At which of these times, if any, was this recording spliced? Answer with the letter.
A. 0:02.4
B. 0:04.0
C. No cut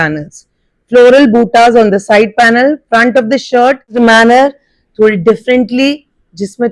B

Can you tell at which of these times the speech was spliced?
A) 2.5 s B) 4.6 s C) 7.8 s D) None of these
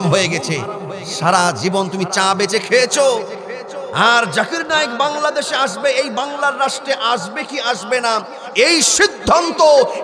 D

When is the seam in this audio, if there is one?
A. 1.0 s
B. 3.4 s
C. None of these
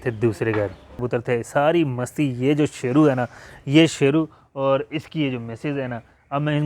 A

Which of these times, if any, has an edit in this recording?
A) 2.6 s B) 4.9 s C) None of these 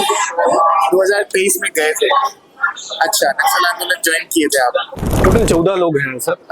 B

